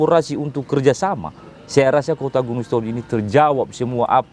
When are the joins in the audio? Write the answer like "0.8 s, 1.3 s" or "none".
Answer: none